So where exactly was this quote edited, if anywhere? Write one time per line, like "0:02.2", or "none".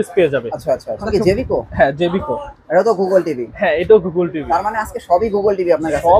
0:01.1